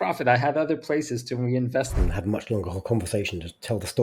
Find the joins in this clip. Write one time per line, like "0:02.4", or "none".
0:01.9